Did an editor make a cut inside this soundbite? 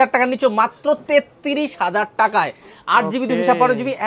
no; 0 cuts

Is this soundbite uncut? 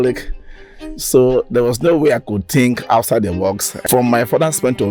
no; 1 cut; at 3.7 s

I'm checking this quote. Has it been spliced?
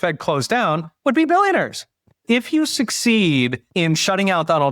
yes; 2 cuts; at 2.1 s, 3.6 s

